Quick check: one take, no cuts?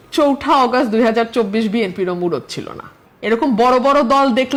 yes; 0 cuts

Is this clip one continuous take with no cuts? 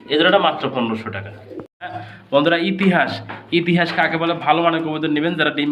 no; 1 cut; at 2.1 s

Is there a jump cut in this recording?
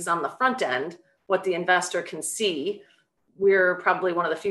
no; 0 cuts

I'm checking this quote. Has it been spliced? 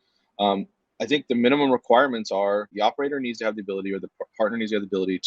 yes; 1 cut; at 2.7 s

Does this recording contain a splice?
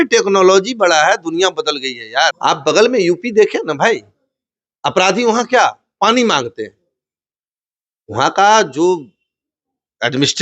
yes; 1 cut; at 2.4 s

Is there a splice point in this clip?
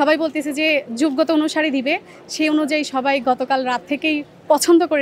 no; 0 cuts

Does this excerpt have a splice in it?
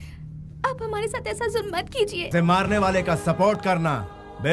yes; 1 cut; at 2.2 s

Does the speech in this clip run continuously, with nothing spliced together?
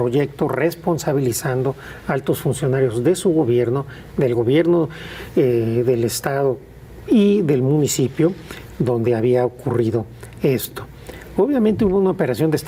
yes; 0 cuts

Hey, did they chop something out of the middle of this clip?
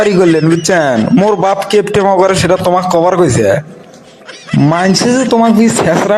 no; 0 cuts

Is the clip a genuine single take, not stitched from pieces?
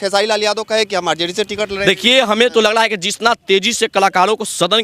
yes; 0 cuts

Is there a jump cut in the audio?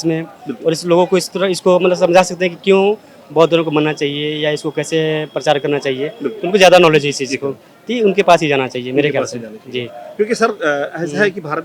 no; 0 cuts

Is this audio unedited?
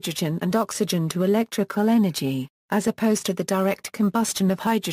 yes; 0 cuts

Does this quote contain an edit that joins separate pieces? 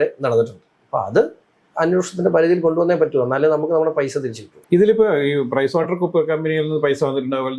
no; 0 cuts

